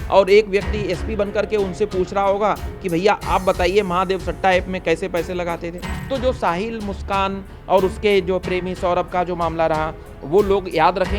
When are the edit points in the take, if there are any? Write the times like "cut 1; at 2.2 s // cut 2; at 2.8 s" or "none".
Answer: cut 1; at 5.9 s